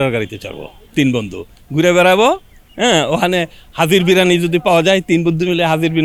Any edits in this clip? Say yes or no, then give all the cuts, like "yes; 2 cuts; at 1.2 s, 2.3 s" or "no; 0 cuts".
no; 0 cuts